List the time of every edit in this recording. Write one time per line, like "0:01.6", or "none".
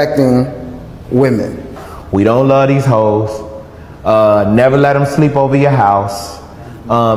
none